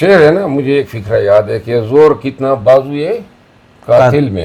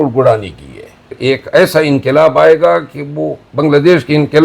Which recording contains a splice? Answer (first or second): second